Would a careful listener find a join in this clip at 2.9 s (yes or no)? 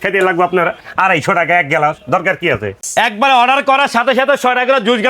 yes